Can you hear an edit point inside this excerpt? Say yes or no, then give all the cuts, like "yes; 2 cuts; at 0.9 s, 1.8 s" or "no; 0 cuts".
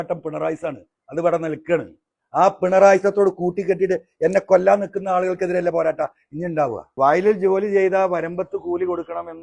yes; 1 cut; at 6.8 s